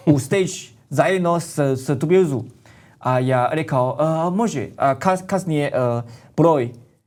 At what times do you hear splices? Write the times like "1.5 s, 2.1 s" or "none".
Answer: none